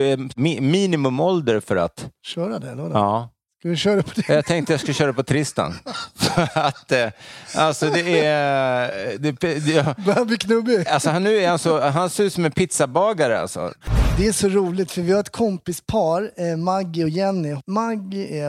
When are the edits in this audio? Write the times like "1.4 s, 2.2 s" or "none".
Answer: 13.8 s, 17.5 s